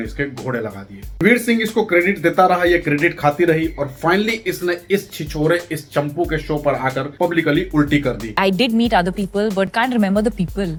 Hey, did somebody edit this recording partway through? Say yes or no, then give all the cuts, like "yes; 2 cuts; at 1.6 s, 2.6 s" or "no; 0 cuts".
no; 0 cuts